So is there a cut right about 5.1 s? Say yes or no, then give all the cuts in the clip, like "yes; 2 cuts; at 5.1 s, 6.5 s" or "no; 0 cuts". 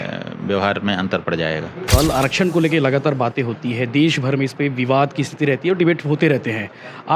no; 1 cut; at 1.9 s